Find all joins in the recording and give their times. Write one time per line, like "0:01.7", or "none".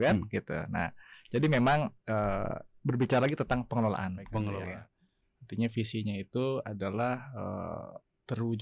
0:04.8

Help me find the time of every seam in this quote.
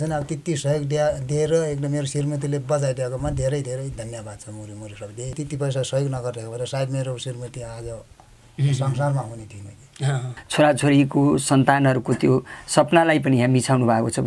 0:05.4
0:10.4

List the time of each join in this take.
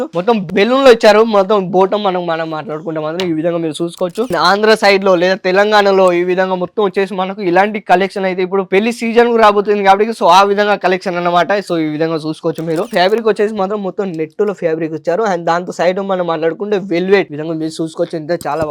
0:04.3
0:12.9

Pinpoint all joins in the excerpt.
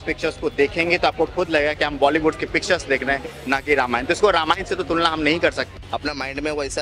0:05.7

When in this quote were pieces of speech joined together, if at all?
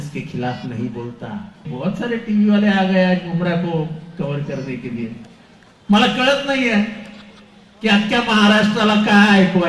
0:01.7

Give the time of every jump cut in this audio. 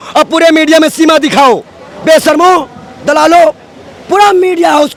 none

